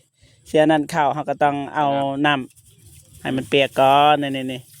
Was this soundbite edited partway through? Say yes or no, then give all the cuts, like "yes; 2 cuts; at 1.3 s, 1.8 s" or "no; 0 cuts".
no; 0 cuts